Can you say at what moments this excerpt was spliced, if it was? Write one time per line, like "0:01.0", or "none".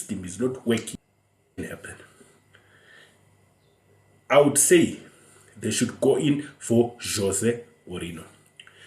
0:01.6